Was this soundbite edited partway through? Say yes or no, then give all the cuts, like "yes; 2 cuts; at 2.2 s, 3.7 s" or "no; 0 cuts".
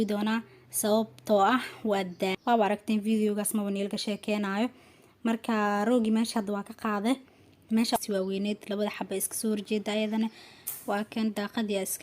yes; 2 cuts; at 2.4 s, 8.0 s